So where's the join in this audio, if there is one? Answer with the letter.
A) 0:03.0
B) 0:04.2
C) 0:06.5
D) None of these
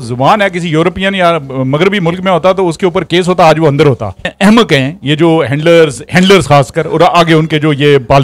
B